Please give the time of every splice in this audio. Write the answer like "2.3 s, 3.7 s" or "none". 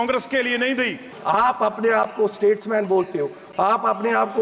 1.1 s